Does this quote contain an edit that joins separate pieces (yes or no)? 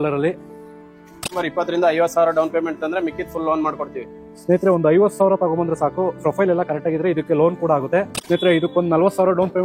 yes